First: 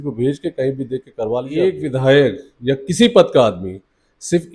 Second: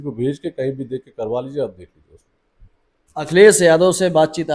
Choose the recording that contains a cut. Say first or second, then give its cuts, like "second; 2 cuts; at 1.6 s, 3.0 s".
first; 1 cut; at 1.5 s